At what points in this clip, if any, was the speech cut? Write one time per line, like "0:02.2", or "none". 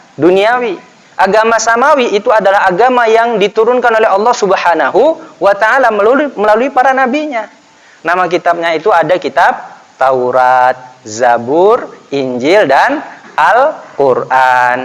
none